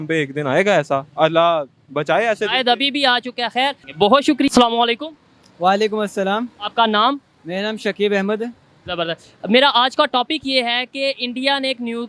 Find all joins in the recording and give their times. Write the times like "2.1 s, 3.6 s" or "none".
none